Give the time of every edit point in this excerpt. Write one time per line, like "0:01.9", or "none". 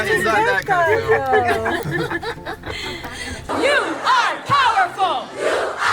0:03.5

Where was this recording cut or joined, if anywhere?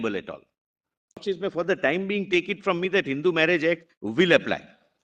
0:01.2

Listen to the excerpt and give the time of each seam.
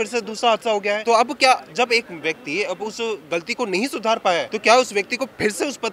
0:01.0
0:04.5

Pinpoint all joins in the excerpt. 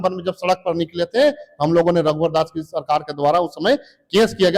none

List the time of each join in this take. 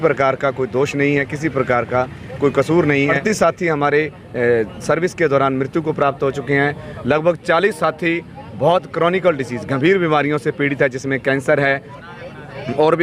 0:03.2

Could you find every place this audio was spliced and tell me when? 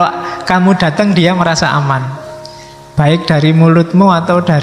none

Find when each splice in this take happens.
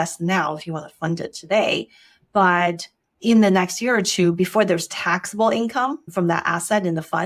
none

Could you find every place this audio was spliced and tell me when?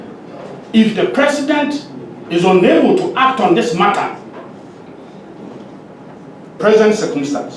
0:06.6

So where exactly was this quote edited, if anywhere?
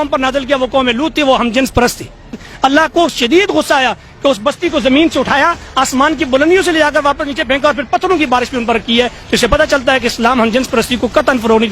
0:02.4

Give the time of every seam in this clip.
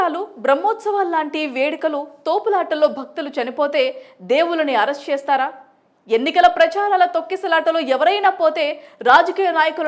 none

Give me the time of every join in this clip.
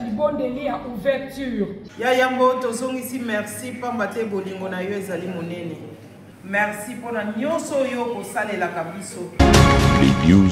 0:09.4

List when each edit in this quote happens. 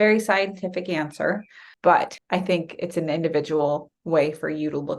0:01.6
0:02.2

